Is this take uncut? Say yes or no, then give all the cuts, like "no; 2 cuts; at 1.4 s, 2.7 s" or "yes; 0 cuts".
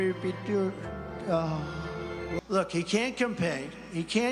no; 1 cut; at 2.4 s